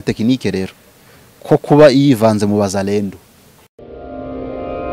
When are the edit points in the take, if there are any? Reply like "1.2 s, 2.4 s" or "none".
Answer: 3.8 s